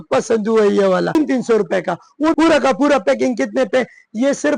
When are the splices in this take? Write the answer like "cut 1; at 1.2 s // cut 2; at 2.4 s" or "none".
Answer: cut 1; at 1.2 s // cut 2; at 2.3 s